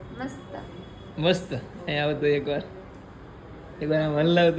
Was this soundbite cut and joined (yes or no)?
no